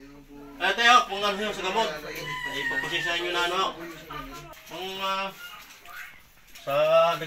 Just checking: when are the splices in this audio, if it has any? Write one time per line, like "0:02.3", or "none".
0:04.5